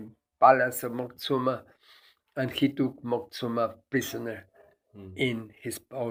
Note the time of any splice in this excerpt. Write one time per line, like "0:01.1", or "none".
none